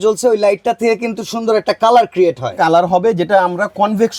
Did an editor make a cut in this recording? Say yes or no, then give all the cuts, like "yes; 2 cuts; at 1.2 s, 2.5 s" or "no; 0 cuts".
no; 0 cuts